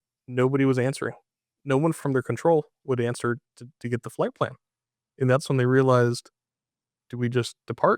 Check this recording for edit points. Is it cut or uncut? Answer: cut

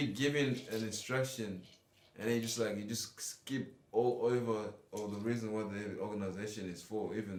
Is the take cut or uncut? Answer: uncut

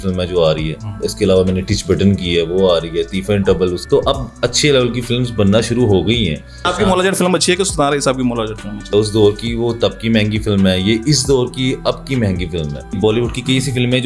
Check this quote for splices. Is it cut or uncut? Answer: cut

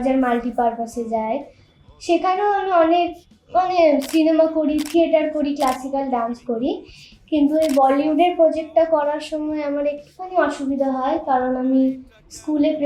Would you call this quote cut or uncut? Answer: uncut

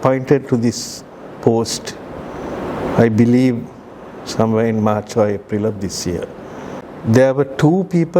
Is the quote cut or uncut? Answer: cut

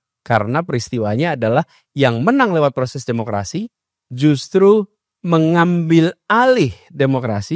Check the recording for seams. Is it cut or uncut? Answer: uncut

